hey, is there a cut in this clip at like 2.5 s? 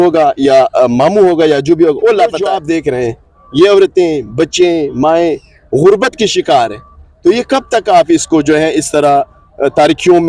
yes; 1 cut; at 2.5 s

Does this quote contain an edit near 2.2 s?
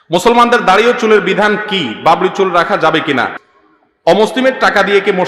no; 1 cut; at 3.5 s

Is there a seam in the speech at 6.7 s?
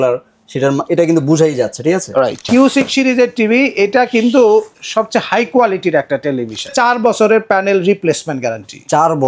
yes; 2 cuts; at 2.4 s, 6.7 s

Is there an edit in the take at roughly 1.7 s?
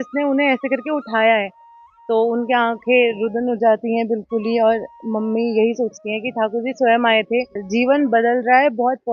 no; 1 cut; at 7.6 s

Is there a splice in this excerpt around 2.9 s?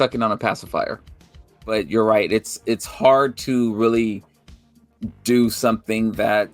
no; 1 cut; at 1.6 s

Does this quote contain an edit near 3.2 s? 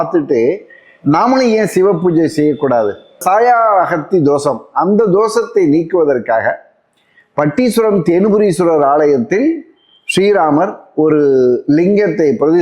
yes; 1 cut; at 3.2 s

